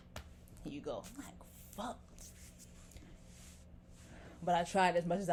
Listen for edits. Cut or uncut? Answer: uncut